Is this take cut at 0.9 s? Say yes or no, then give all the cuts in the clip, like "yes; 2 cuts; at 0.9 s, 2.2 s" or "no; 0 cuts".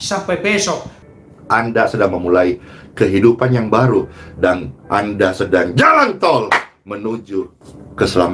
yes; 1 cut; at 0.9 s